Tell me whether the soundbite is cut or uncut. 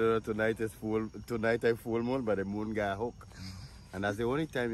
uncut